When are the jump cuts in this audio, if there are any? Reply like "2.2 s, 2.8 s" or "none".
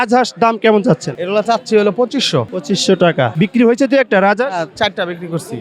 1.1 s, 2.5 s, 3.3 s